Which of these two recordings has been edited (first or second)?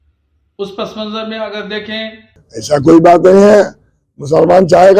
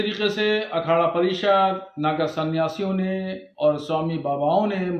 first